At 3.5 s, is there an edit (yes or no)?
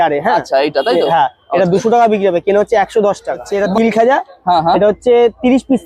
yes